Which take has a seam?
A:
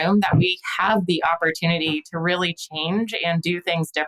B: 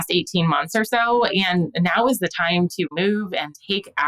B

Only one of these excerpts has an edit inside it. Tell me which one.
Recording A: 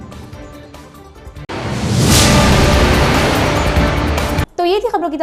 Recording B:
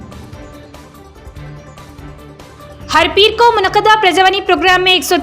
B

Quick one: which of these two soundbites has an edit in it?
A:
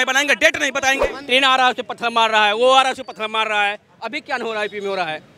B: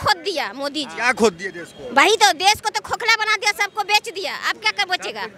A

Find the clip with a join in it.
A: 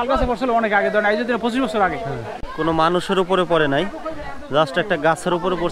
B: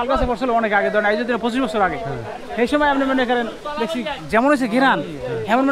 A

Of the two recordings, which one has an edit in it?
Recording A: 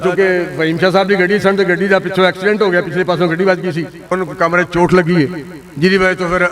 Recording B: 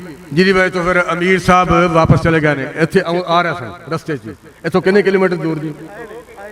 A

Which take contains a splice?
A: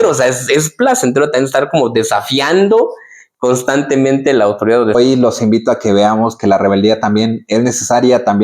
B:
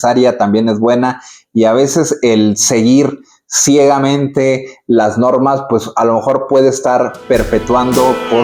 A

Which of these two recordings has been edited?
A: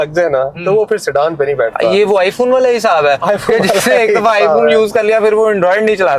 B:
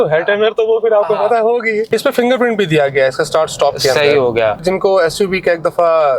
B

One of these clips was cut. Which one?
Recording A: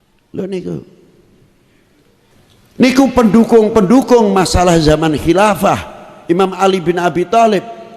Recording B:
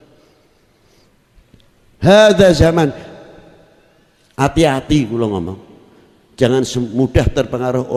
A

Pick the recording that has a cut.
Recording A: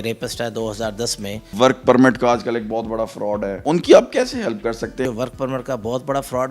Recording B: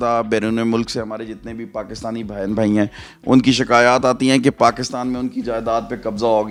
A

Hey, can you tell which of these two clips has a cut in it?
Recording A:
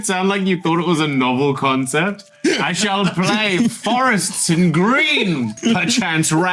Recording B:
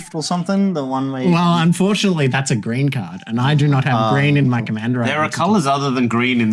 A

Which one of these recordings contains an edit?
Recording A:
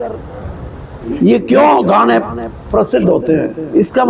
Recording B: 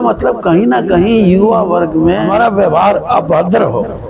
B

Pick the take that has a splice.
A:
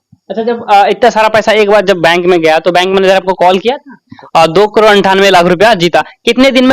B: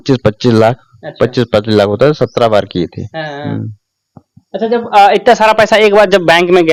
A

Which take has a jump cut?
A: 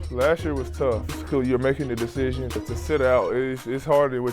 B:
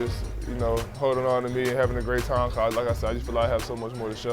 A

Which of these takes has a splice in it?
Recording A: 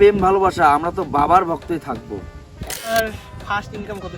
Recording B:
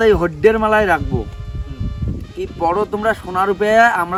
A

